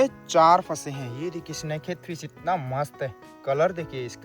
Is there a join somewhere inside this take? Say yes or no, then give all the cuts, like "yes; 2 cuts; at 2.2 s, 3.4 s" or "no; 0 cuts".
no; 0 cuts